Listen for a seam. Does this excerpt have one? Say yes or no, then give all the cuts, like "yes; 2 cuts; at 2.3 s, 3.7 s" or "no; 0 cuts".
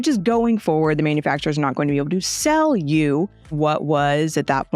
no; 0 cuts